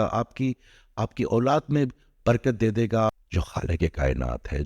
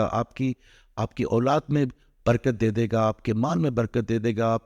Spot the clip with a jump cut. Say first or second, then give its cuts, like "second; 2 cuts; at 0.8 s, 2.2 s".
first; 1 cut; at 3.2 s